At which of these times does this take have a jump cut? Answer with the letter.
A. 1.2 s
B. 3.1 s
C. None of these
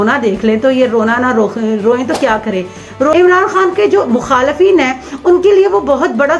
B